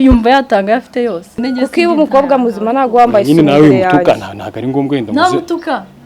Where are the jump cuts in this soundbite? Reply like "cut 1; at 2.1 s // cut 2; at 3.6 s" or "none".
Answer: cut 1; at 1.3 s